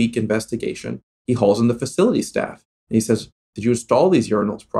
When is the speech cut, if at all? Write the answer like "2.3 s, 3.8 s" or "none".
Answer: 1.1 s